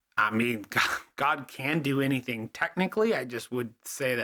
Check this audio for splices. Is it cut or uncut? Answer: uncut